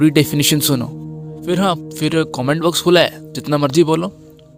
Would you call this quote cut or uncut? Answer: uncut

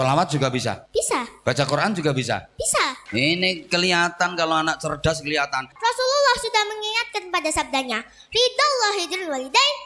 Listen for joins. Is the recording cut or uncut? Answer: cut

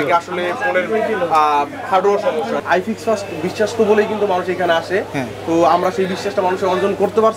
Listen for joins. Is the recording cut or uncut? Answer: cut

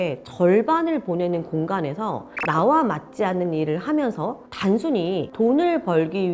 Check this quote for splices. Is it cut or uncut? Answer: uncut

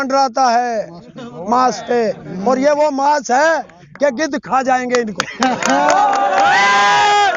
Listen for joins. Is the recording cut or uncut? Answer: uncut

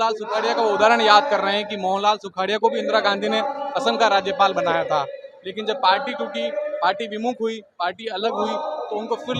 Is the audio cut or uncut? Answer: uncut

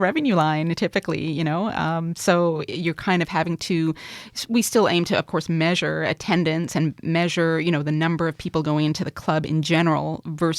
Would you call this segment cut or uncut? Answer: uncut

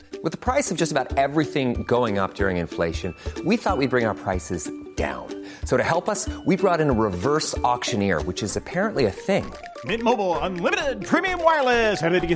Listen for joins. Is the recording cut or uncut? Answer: uncut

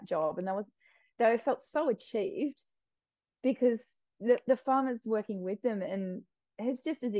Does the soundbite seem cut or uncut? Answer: uncut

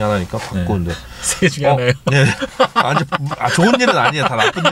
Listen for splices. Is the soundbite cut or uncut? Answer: uncut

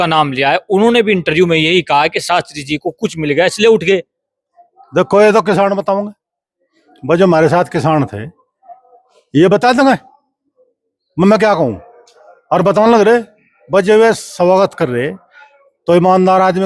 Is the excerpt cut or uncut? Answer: uncut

